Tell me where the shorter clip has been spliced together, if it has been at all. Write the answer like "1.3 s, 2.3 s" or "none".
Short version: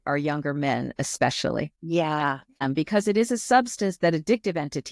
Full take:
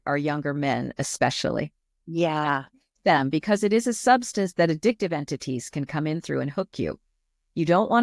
1.8 s, 2.6 s